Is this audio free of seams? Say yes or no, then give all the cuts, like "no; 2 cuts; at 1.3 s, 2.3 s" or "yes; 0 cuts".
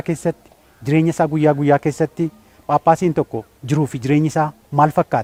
yes; 0 cuts